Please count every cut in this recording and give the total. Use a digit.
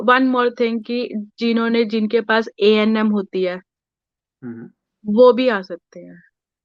0